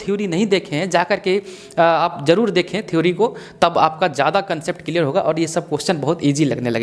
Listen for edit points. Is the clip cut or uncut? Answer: uncut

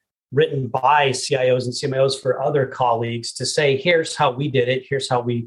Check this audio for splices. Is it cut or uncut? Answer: uncut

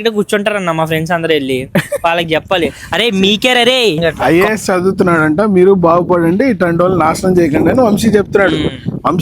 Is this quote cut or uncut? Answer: cut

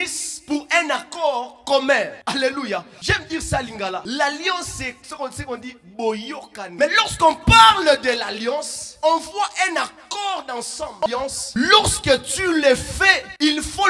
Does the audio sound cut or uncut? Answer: cut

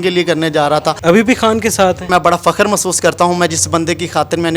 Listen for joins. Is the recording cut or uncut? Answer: cut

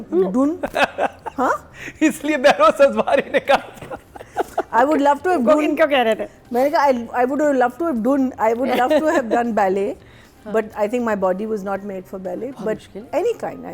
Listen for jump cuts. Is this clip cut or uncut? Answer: uncut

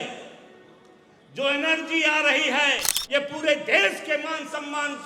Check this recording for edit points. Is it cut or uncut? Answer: cut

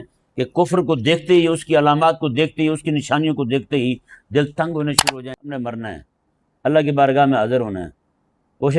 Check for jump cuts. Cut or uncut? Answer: cut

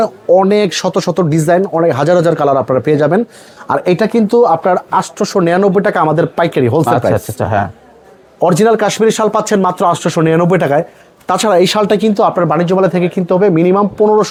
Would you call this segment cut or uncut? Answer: uncut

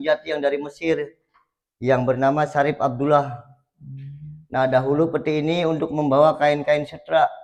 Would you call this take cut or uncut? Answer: uncut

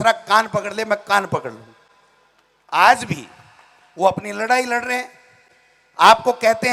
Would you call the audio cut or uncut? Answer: uncut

